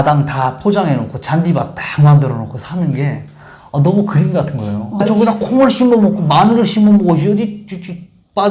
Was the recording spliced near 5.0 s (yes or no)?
yes